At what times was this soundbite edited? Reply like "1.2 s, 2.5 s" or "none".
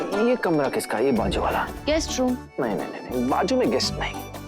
1.7 s